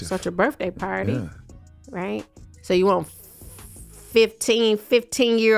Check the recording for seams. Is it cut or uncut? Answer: uncut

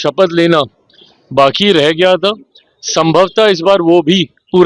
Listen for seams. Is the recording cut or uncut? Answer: uncut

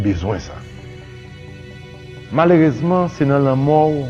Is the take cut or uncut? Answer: uncut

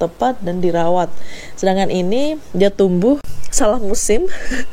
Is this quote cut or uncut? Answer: cut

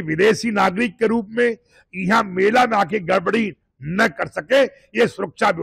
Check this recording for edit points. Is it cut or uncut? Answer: uncut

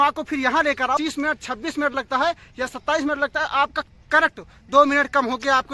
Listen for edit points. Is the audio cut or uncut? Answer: cut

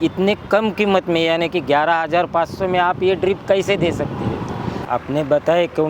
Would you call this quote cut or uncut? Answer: cut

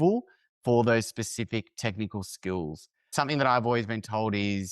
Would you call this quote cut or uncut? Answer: cut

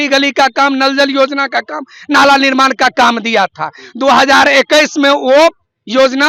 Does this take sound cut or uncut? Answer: uncut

